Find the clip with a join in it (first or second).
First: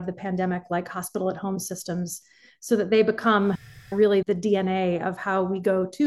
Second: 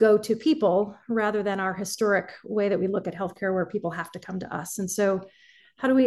first